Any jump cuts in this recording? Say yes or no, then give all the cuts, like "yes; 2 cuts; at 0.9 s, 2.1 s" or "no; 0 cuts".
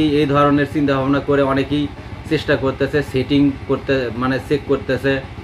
no; 0 cuts